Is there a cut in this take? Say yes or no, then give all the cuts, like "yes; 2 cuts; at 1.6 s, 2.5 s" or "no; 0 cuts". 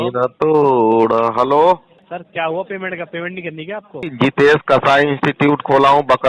yes; 2 cuts; at 1.9 s, 4.1 s